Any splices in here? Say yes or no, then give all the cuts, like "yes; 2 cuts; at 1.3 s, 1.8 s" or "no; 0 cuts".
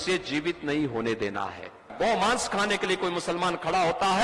yes; 1 cut; at 1.9 s